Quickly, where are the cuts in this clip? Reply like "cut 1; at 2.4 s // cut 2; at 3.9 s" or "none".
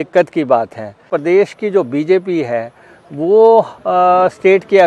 cut 1; at 1.1 s